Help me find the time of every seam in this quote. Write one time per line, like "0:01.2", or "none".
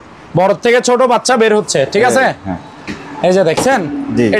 none